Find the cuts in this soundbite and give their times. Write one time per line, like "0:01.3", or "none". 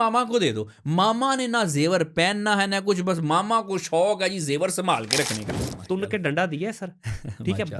0:05.5